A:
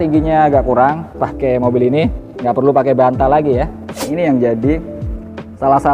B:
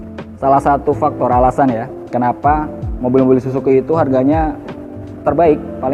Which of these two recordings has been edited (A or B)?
A